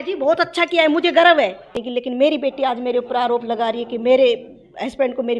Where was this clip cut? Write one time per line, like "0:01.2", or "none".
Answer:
0:01.8